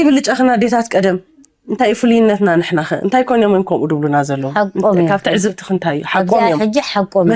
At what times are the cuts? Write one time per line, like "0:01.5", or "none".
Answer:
none